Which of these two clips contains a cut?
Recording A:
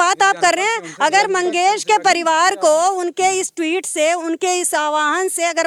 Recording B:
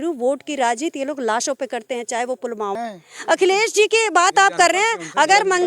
B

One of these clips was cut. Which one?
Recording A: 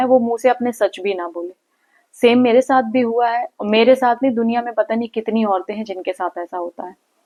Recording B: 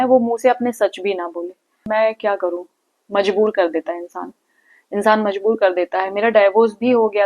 B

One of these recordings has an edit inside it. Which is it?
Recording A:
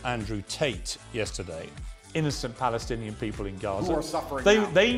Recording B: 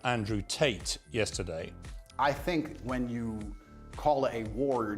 B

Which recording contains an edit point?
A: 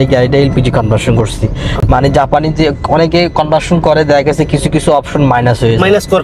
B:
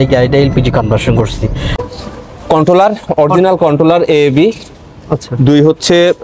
B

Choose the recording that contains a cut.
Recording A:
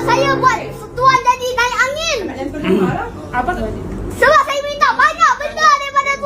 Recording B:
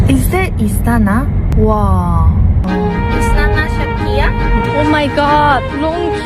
A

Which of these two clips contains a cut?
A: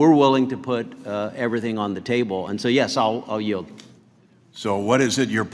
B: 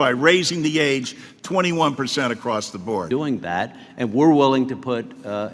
B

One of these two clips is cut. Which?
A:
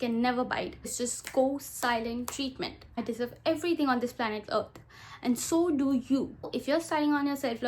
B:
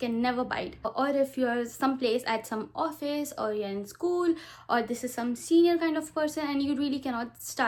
A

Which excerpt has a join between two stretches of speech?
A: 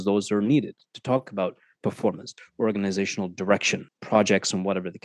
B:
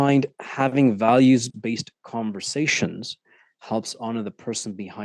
A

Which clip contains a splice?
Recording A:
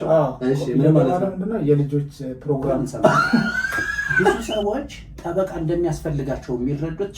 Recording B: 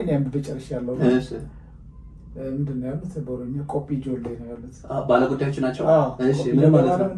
A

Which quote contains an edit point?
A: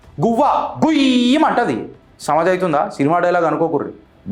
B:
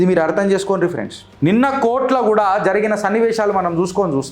B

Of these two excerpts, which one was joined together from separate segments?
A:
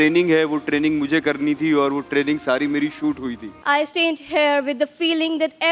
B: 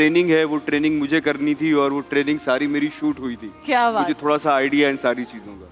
A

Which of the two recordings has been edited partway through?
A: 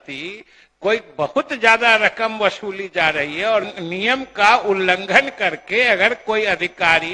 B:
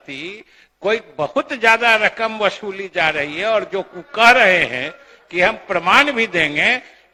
A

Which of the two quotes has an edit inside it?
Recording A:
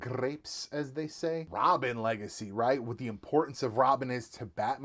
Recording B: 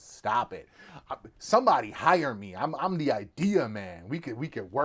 A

